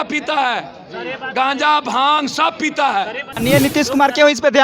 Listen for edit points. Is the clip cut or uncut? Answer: cut